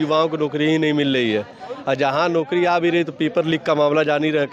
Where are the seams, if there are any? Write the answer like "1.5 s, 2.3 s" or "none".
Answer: none

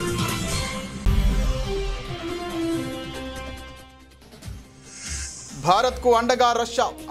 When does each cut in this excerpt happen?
0.9 s, 5.4 s

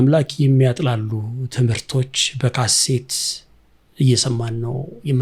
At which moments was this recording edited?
none

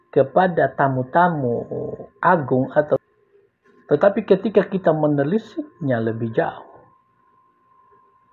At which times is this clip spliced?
3.0 s

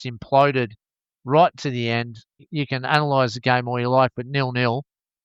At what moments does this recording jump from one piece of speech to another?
2.5 s

